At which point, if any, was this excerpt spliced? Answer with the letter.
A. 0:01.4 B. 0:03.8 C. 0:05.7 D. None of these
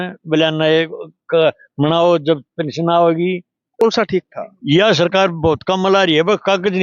B